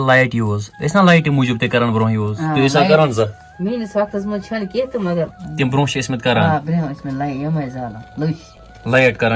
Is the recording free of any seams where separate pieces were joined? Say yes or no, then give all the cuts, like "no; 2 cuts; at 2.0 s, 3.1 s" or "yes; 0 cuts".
no; 2 cuts; at 3.4 s, 5.4 s